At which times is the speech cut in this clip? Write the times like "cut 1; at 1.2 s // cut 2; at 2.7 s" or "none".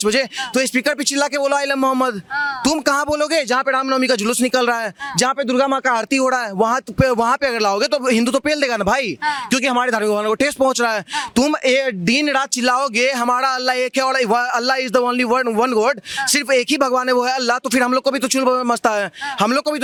none